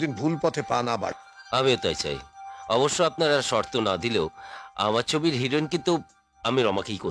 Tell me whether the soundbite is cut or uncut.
uncut